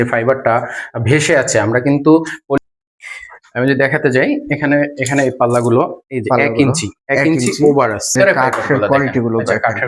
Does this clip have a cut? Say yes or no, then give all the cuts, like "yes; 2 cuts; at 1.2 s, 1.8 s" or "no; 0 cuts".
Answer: yes; 2 cuts; at 2.6 s, 8.1 s